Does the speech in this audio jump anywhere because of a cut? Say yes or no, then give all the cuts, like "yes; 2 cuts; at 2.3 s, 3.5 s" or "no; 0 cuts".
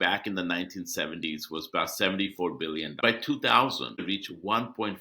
yes; 2 cuts; at 3.0 s, 4.0 s